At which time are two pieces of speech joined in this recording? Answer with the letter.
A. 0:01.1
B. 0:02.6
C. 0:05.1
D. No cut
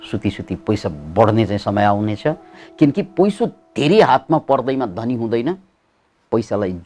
B